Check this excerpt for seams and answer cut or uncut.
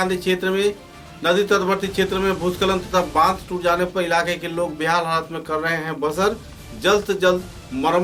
uncut